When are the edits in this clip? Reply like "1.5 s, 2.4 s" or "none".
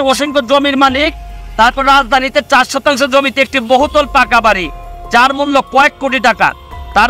none